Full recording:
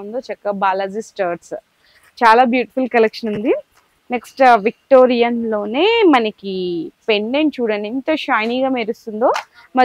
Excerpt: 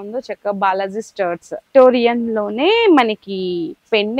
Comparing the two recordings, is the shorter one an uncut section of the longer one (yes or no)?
no